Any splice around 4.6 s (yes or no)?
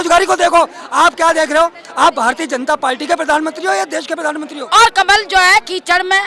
yes